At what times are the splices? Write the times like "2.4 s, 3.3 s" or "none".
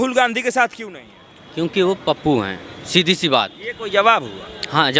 none